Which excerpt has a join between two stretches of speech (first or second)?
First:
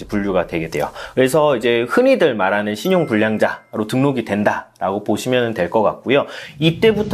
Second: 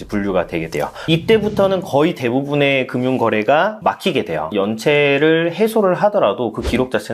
second